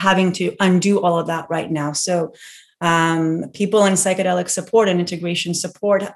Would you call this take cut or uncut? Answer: uncut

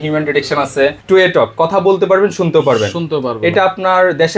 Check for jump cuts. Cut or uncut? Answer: cut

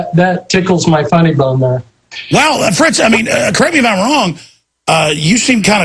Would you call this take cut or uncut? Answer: uncut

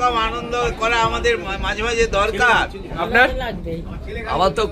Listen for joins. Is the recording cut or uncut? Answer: cut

